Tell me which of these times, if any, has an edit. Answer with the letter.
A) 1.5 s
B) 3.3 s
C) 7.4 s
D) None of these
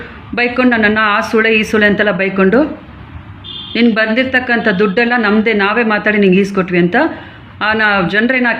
D